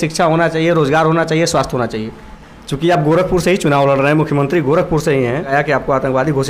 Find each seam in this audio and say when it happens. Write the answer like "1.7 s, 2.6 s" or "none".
2.3 s, 5.5 s